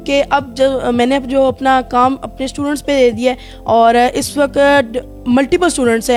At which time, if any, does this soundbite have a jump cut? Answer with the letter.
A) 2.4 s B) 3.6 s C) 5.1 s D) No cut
D